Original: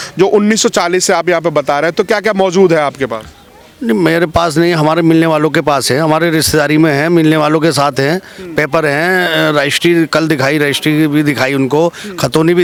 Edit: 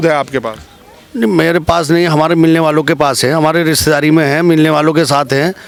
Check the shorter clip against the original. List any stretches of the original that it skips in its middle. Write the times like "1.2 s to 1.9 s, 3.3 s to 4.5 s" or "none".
none